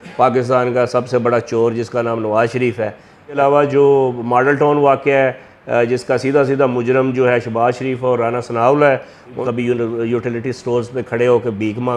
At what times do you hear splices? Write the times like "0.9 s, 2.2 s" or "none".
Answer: 3.4 s, 9.4 s